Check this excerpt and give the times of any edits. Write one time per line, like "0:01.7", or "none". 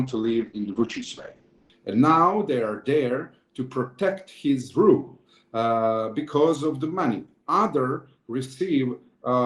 0:01.6